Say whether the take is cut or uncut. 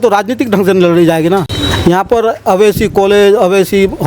cut